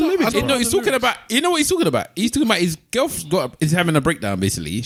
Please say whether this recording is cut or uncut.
uncut